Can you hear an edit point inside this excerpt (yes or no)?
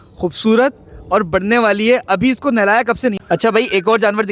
yes